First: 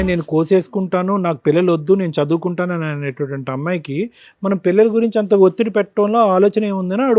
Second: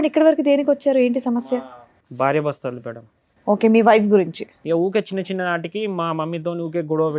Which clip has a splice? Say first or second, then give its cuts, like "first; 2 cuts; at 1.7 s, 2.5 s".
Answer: second; 1 cut; at 4.5 s